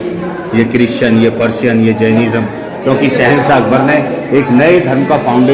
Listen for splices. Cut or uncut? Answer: cut